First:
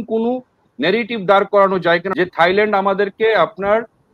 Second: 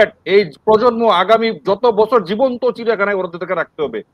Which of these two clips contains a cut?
first; 1 cut; at 2.1 s

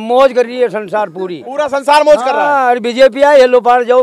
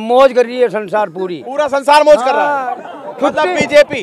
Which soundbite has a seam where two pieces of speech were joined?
second; 1 cut; at 2.6 s

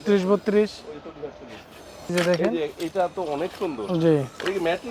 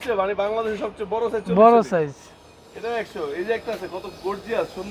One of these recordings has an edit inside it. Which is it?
first; 1 cut; at 2.1 s

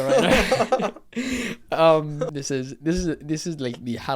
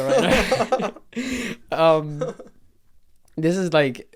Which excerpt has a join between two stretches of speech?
first; 1 cut; at 2.4 s

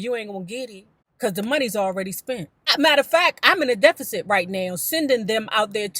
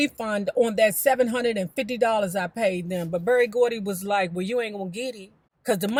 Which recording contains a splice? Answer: first; 1 cut; at 2.6 s

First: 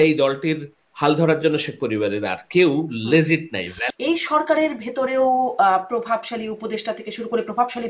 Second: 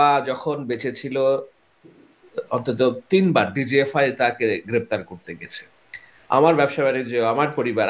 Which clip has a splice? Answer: first; 1 cut; at 3.8 s

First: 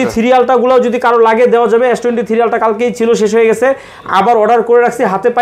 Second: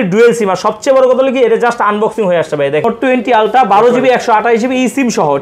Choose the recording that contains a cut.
second; 1 cut; at 2.8 s

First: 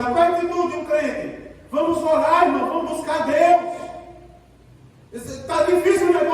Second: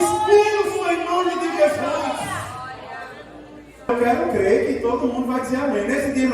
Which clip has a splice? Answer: second; 1 cut; at 3.9 s

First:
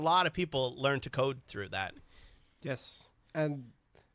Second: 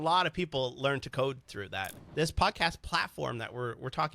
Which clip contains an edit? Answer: second; 1 cut; at 2.0 s

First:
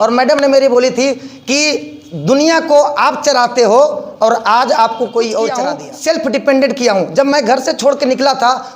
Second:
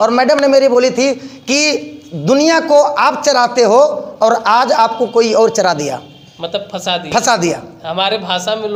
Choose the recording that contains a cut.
first; 1 cut; at 5.8 s

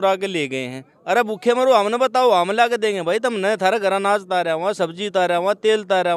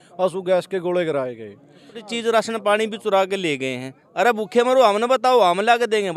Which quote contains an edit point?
second; 1 cut; at 2.1 s

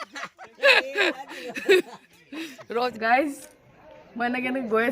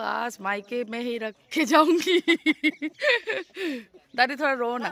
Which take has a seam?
first; 1 cut; at 2.9 s

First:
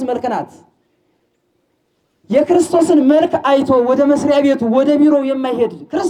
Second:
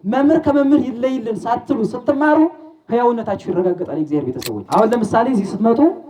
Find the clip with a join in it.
second; 1 cut; at 4.5 s

